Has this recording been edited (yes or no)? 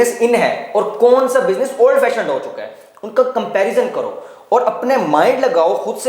no